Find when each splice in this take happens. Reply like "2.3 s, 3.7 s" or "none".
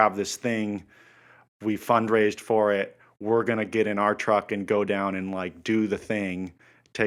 none